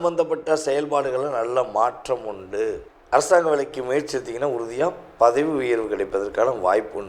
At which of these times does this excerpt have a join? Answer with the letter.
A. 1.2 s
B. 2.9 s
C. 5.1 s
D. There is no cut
B